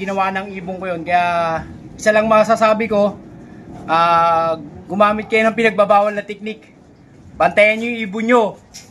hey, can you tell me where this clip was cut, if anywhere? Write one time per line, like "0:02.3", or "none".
none